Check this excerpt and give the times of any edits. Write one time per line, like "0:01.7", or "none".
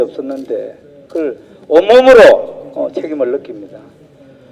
0:01.3